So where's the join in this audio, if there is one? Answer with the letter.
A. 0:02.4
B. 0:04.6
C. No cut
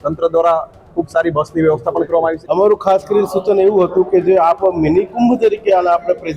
A